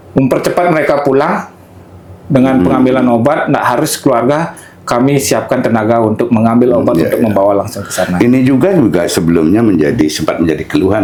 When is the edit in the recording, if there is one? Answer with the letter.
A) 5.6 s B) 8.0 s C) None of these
C